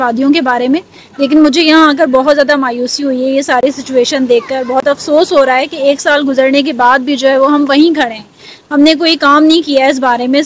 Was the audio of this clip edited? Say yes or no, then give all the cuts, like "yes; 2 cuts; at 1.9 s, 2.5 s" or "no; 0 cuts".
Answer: no; 0 cuts